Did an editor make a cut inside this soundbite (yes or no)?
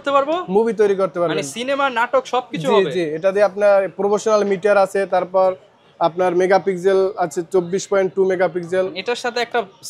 no